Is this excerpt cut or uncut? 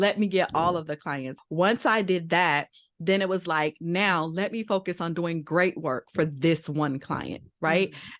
cut